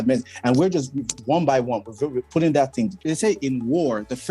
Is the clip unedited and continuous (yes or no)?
no